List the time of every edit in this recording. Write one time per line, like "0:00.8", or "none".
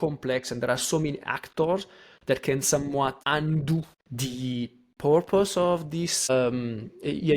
0:03.2
0:04.0
0:06.3